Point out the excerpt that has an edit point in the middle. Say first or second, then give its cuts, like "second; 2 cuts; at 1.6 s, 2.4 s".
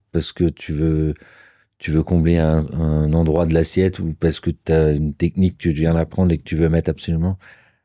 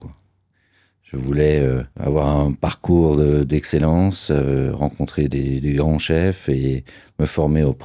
second; 1 cut; at 1.9 s